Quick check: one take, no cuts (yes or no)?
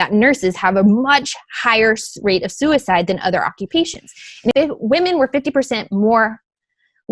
no